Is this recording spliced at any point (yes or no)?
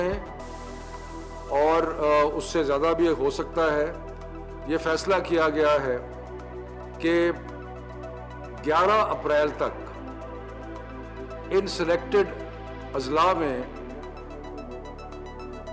yes